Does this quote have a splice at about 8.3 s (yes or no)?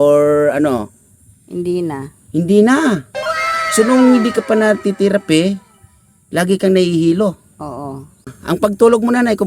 yes